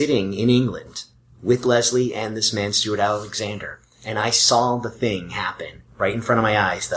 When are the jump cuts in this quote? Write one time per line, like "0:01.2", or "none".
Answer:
none